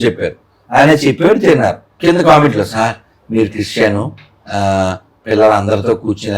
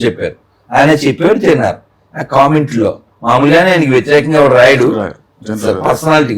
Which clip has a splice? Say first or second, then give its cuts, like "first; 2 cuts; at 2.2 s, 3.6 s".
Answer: first; 1 cut; at 2.0 s